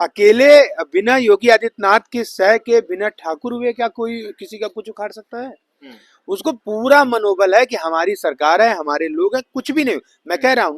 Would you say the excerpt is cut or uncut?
uncut